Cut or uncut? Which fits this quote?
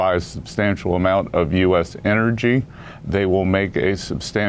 uncut